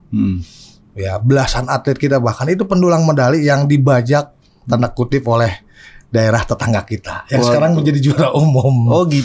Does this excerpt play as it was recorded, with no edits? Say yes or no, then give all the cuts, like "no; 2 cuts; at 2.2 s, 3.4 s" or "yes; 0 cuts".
yes; 0 cuts